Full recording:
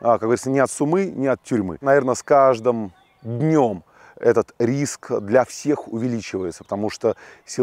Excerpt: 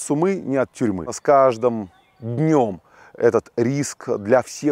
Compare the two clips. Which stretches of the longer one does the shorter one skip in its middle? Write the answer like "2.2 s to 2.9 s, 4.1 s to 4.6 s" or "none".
1.8 s to 2.1 s